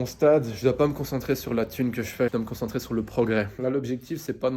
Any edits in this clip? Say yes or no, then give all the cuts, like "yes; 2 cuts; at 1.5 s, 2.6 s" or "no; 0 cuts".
yes; 2 cuts; at 2.3 s, 3.5 s